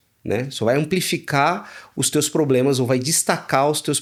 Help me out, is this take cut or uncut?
uncut